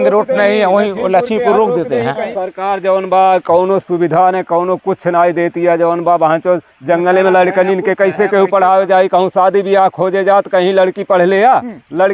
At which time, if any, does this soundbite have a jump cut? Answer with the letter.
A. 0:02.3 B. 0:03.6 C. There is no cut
A